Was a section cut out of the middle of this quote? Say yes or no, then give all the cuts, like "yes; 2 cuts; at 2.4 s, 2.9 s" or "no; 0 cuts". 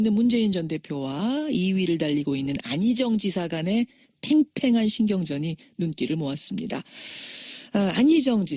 no; 0 cuts